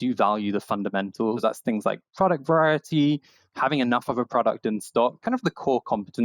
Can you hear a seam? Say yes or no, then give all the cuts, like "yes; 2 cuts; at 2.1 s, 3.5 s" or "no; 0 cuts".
yes; 2 cuts; at 1.4 s, 5.2 s